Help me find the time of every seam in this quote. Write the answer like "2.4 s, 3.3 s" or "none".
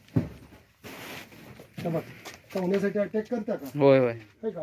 none